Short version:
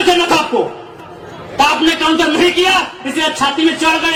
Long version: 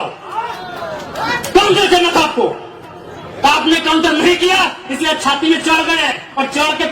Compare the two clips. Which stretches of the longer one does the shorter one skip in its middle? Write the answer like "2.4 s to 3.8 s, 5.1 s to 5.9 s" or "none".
none

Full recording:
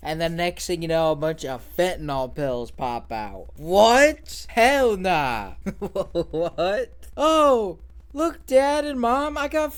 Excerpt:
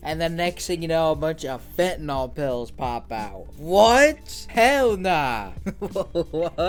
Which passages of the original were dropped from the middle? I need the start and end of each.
none

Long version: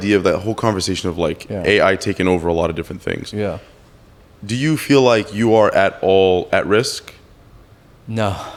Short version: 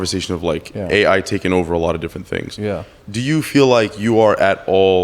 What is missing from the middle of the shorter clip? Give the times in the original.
3.7 s to 4.3 s

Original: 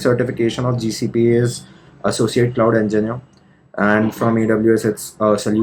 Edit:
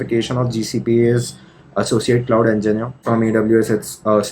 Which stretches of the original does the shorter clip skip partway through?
3.3 s to 4.2 s

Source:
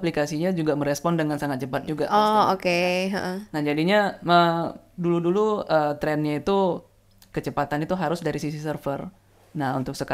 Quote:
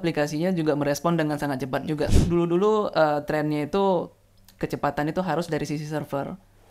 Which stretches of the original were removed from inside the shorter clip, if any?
2.0 s to 4.8 s

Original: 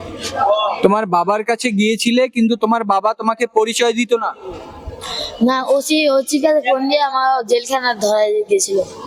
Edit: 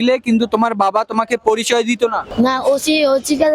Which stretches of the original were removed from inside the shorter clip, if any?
4.3 s to 5.3 s

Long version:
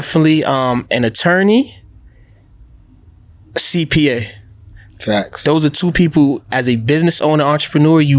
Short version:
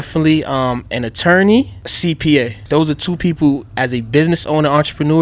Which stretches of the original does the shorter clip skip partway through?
1.8 s to 3.5 s, 4.3 s to 5.3 s

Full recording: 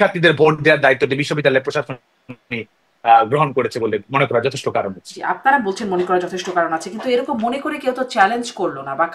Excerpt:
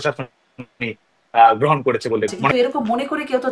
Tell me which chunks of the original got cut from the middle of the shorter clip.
4.2 s to 7.0 s

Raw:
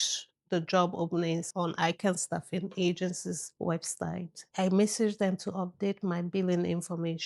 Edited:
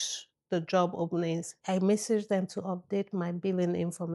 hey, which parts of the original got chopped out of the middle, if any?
1.5 s to 4.4 s

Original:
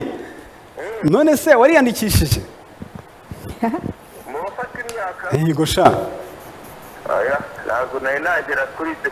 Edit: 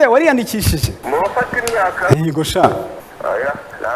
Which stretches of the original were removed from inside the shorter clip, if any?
2.4 s to 4.2 s, 6.3 s to 6.9 s

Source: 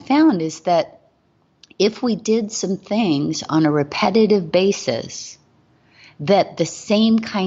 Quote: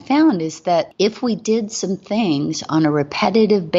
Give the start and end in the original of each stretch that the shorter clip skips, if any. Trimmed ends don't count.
0.9 s to 1.7 s

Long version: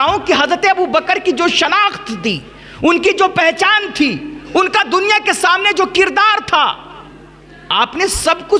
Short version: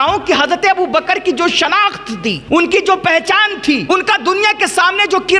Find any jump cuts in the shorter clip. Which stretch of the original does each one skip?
2.4 s to 2.7 s, 4.2 s to 4.5 s

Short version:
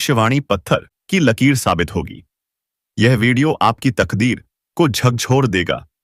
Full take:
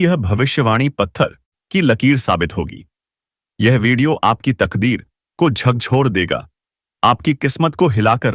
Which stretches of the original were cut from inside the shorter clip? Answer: 1.4 s to 1.6 s

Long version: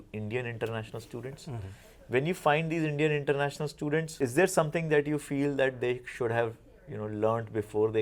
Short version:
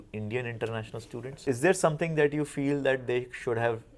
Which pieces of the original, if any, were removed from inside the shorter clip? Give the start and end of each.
1.4 s to 4.1 s

